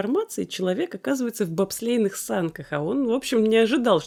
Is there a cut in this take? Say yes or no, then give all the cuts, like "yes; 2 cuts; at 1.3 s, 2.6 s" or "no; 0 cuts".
no; 0 cuts